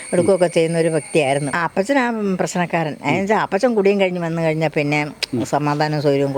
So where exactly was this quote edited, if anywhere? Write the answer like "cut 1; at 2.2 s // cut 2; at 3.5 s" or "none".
cut 1; at 1.6 s